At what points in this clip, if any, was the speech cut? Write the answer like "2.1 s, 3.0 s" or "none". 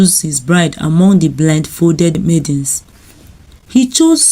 2.2 s